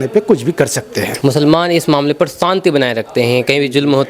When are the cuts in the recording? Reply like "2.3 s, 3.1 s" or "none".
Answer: 1.0 s